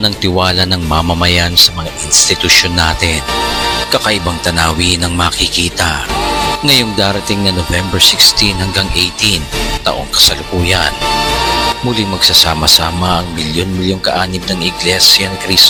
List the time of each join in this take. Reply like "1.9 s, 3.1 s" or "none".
none